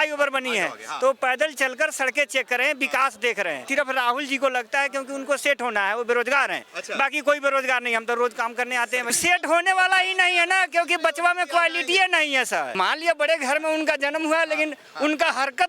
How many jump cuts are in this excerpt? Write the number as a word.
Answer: three